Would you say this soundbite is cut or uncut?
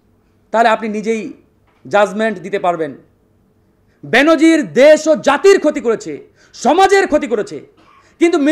uncut